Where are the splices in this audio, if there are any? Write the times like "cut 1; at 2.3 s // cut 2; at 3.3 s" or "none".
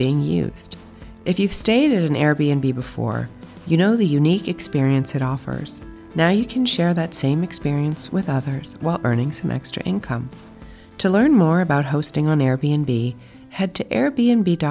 none